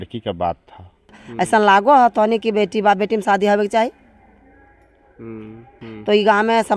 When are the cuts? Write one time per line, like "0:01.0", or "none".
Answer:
0:01.2
0:05.9